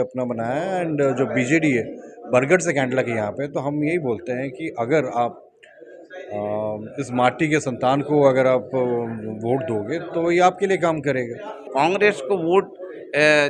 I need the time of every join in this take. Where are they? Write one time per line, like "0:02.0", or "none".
0:11.7